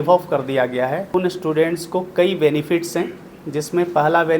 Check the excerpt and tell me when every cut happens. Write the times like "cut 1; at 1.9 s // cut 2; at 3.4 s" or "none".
cut 1; at 1.1 s